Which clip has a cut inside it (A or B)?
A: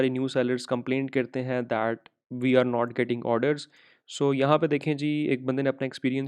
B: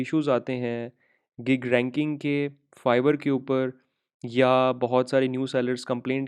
A